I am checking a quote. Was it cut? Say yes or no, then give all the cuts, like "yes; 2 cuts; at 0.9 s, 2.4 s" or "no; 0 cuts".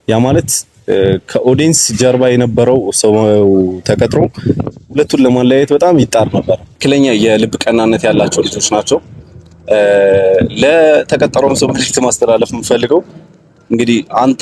yes; 1 cut; at 6.7 s